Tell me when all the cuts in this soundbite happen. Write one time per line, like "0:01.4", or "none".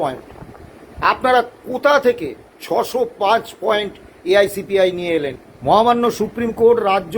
0:05.4